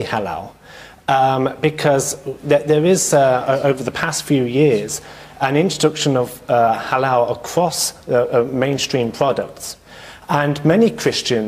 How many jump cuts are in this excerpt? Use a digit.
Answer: 1